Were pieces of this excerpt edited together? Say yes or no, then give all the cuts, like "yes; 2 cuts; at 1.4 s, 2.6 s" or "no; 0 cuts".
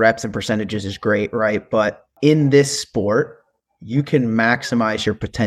yes; 1 cut; at 2.0 s